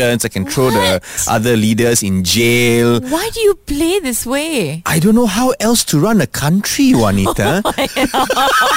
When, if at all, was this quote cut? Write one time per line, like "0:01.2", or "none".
none